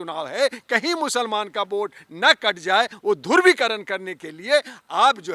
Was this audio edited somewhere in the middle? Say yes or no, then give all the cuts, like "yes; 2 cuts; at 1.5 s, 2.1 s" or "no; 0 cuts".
no; 0 cuts